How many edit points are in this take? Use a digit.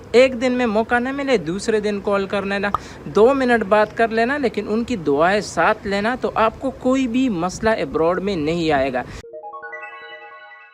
1